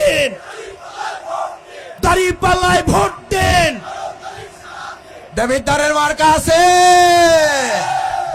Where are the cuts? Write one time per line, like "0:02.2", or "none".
0:01.8
0:05.1

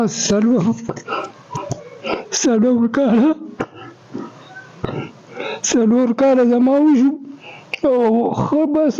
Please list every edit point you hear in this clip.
0:01.5

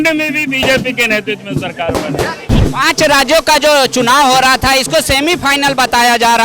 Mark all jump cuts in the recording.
0:02.5

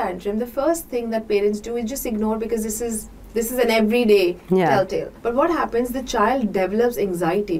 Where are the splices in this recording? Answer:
0:05.1

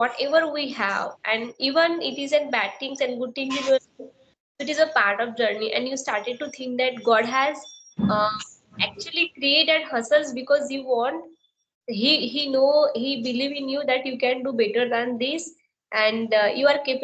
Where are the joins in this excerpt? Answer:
none

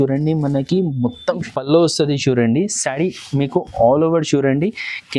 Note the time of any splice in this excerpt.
0:01.4

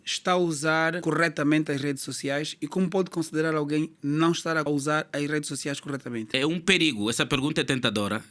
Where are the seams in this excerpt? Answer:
0:01.0
0:04.6
0:06.3

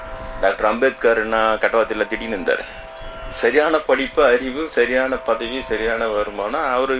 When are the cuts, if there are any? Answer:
none

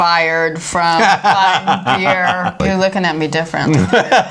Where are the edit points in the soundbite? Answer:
0:02.5

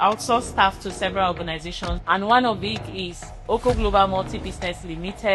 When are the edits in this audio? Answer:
0:01.9

